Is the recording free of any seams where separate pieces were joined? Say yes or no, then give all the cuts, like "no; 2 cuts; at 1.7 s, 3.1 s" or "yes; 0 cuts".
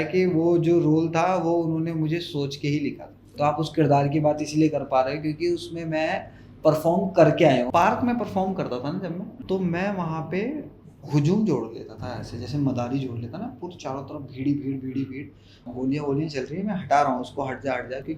no; 4 cuts; at 3.2 s, 7.7 s, 9.3 s, 15.6 s